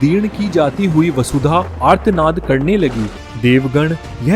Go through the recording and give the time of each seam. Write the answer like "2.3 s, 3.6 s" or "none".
3.1 s